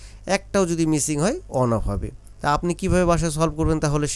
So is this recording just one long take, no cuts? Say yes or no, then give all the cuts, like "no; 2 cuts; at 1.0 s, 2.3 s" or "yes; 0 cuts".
yes; 0 cuts